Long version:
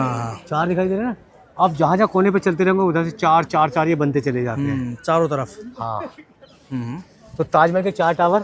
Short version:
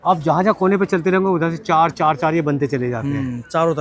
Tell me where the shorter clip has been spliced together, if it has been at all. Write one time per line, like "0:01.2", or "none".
none